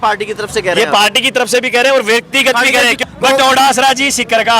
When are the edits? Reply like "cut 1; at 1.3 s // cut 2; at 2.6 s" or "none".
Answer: cut 1; at 3.1 s